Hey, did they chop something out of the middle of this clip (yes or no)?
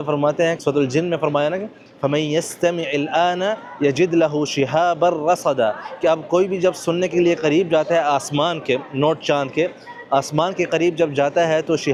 no